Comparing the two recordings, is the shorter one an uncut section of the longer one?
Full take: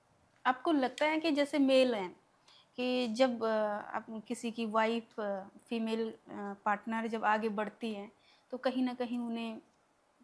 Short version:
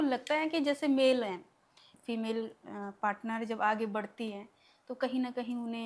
no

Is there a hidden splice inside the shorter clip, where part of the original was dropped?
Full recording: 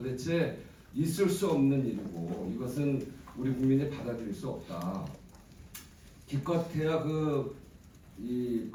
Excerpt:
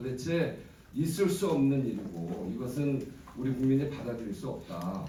no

